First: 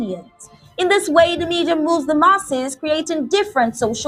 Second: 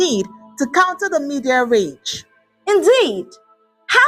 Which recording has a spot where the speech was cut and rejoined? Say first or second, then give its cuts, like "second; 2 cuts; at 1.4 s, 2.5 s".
second; 1 cut; at 1.0 s